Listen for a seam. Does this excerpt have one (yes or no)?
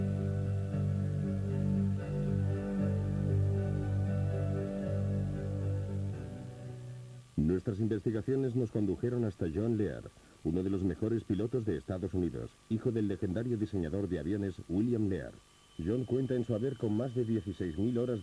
yes